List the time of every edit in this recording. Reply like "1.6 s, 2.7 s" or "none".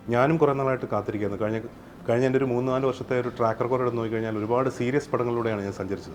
none